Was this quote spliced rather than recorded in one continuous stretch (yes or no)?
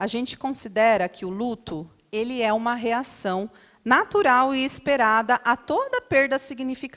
no